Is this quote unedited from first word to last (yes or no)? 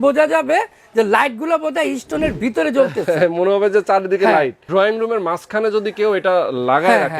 no